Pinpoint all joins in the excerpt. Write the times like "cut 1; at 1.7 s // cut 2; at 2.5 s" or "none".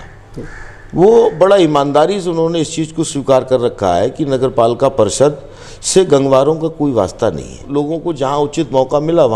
cut 1; at 7.6 s